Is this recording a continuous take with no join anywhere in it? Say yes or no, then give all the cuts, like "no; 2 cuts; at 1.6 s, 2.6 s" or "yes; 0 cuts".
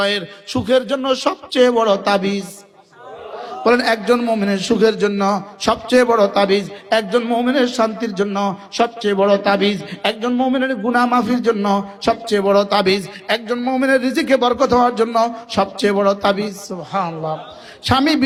yes; 0 cuts